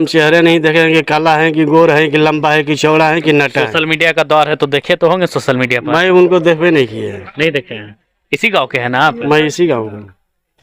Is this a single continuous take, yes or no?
yes